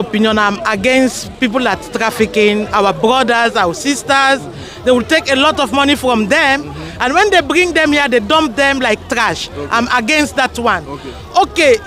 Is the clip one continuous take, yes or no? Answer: yes